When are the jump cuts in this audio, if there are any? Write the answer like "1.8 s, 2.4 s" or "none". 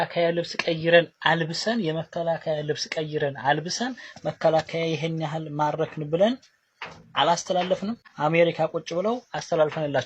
none